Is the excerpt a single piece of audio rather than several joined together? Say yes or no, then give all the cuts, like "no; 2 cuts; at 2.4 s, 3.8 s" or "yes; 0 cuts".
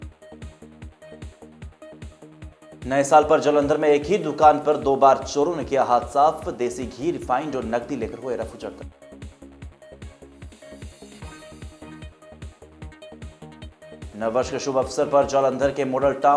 yes; 0 cuts